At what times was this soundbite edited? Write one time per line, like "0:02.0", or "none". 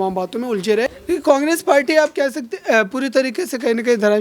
0:01.0